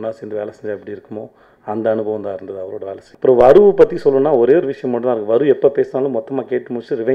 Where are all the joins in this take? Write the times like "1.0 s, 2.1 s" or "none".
3.0 s